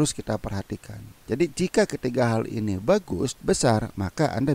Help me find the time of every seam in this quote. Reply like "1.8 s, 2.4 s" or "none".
1.1 s, 3.3 s